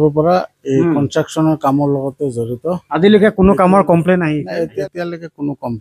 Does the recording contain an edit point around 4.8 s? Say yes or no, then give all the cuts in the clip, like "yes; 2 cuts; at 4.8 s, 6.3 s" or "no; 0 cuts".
yes; 1 cut; at 4.8 s